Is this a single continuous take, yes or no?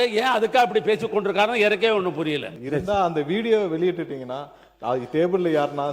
no